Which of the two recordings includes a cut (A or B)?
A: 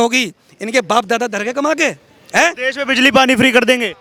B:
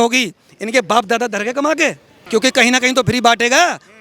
B